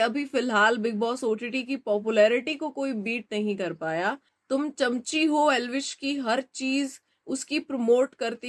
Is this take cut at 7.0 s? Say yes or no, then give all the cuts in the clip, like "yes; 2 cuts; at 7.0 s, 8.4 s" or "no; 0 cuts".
no; 1 cut; at 4.3 s